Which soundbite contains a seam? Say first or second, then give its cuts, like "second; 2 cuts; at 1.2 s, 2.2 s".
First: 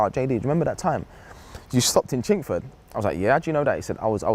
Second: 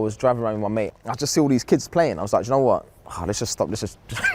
second; 1 cut; at 0.9 s